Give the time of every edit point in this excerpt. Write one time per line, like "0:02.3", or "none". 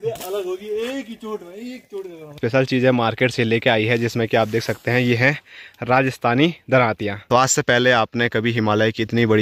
0:02.4
0:07.1